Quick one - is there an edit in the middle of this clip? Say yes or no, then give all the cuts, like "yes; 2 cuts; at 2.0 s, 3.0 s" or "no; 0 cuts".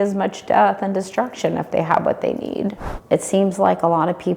yes; 1 cut; at 2.9 s